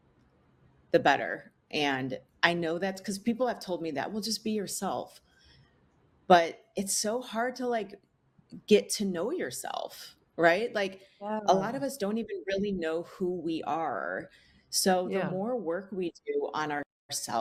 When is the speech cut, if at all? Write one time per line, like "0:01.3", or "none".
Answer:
none